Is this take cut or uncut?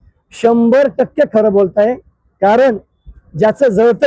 uncut